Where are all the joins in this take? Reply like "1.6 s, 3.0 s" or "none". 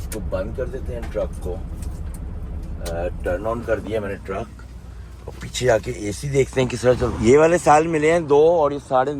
7.1 s